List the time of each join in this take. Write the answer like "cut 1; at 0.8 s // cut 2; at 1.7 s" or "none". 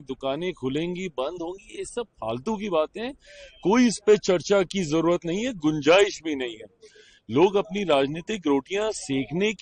none